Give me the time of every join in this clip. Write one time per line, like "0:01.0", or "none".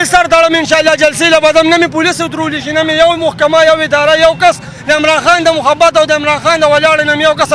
none